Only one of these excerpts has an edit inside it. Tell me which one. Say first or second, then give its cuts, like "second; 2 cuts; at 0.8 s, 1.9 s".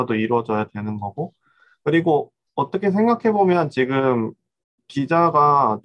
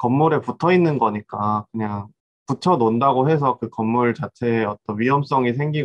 second; 1 cut; at 2.1 s